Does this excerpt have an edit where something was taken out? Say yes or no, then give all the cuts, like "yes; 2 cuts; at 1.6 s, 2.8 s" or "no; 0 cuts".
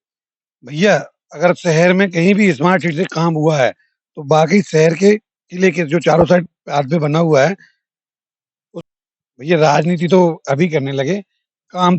yes; 1 cut; at 8.7 s